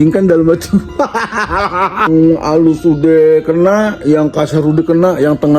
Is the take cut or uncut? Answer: cut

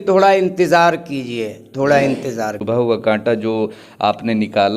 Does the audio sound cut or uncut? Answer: cut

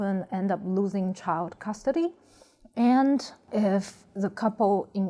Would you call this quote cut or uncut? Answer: uncut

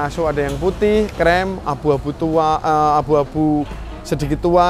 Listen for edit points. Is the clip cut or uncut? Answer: uncut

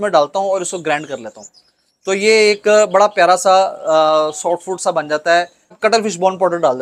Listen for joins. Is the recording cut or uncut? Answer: cut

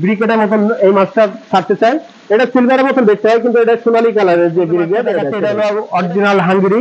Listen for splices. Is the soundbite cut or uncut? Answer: cut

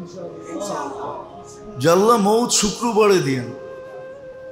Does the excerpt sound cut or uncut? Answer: uncut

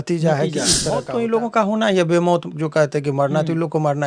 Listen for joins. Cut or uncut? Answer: cut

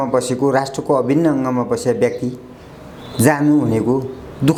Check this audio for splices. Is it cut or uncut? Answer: uncut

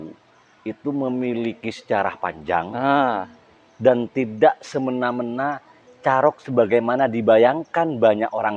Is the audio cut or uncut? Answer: uncut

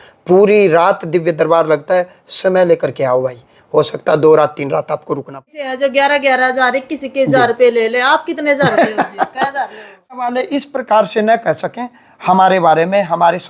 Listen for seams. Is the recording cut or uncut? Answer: cut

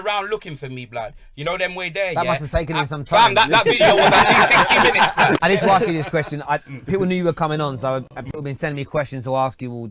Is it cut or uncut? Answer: cut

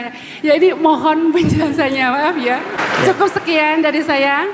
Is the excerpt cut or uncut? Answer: uncut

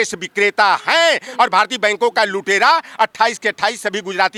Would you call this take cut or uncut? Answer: uncut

